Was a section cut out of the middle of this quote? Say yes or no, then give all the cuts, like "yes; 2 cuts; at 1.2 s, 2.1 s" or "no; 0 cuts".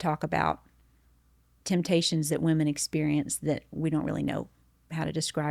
no; 0 cuts